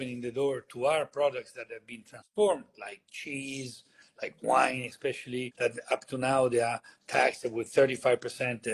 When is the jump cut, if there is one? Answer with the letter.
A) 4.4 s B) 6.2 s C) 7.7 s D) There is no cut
D